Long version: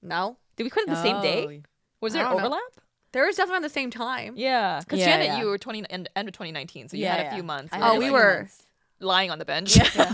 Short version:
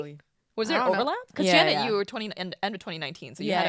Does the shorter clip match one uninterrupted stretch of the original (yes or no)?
no